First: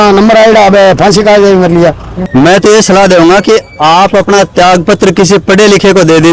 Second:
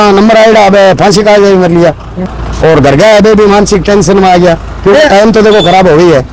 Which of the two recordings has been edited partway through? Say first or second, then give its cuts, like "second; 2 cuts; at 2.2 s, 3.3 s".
first; 1 cut; at 2.2 s